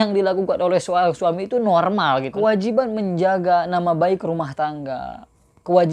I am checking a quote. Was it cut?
yes; 1 cut; at 2.3 s

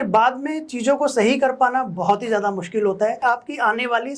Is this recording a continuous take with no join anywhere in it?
no; 1 cut; at 3.2 s

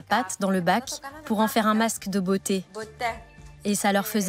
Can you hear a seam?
yes; 1 cut; at 3.0 s

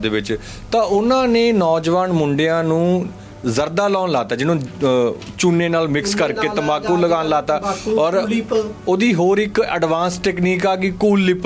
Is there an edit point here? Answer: no; 0 cuts

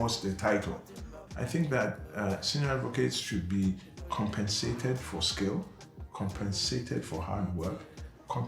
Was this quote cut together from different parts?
no; 0 cuts

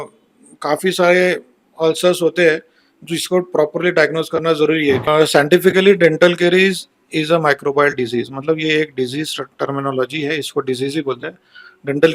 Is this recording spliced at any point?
yes; 1 cut; at 5.1 s

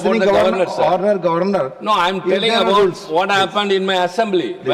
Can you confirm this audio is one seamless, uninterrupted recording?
yes; 0 cuts

